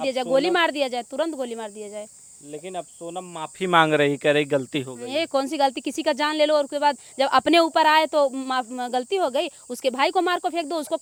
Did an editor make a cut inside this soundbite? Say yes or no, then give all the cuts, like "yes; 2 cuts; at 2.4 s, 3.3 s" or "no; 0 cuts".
no; 0 cuts